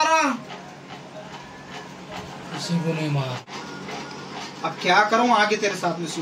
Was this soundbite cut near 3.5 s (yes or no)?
yes